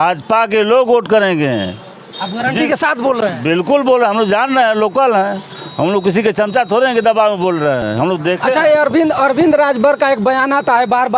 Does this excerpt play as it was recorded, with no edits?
yes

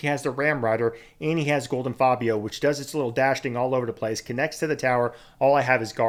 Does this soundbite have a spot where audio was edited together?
no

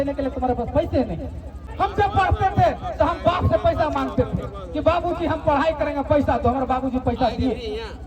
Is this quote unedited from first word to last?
no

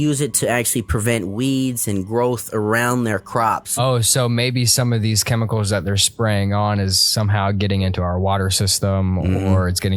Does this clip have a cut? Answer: yes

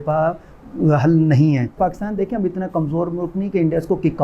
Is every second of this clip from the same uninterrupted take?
no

